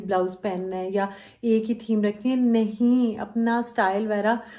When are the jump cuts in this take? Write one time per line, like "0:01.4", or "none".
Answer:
none